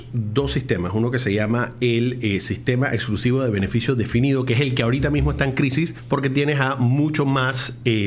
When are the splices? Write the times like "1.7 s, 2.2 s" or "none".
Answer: 6.0 s